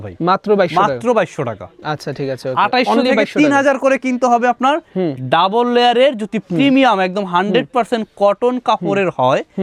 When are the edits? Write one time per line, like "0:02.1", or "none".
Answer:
none

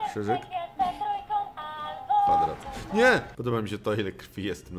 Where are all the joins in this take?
0:03.3

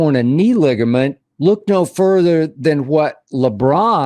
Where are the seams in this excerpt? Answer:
0:01.2

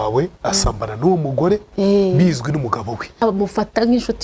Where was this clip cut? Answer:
0:03.1

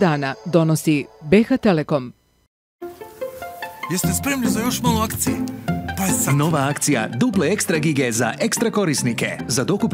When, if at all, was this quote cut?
0:02.8

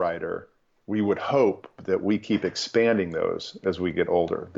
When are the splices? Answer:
none

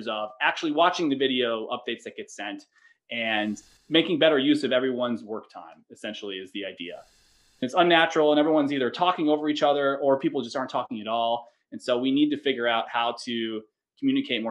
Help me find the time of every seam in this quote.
0:03.7
0:07.7

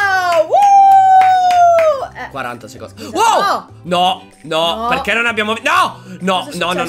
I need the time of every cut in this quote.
none

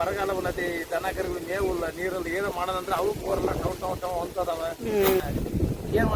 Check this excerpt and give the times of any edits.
0:05.2

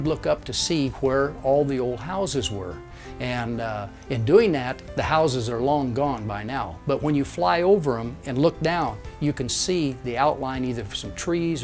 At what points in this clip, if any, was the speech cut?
none

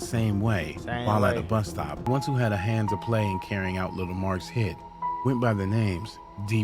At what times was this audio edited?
0:02.0

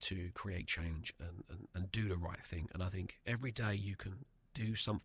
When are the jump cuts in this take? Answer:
none

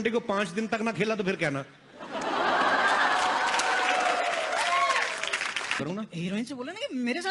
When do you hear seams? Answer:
0:05.8

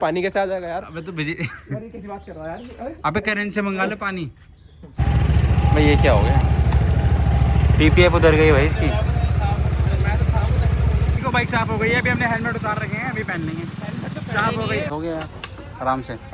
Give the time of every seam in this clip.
0:05.0
0:11.2
0:14.9

